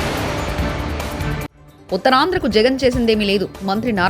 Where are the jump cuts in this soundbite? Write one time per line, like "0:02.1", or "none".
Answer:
0:01.5